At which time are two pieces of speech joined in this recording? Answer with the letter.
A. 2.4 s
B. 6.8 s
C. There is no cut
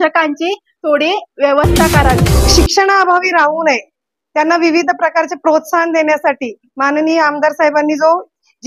A